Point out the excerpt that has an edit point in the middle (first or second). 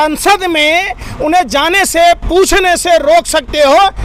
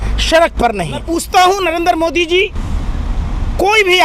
second